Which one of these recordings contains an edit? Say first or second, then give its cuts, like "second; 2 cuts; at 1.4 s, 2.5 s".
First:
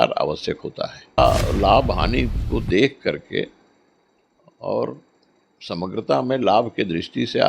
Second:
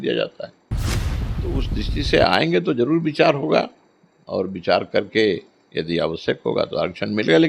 first; 1 cut; at 1.2 s